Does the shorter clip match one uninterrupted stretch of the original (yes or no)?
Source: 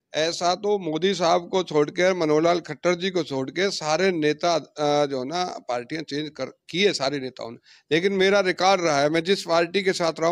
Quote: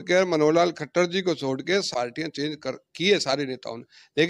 no